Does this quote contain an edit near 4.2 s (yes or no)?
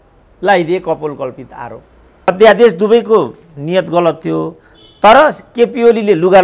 no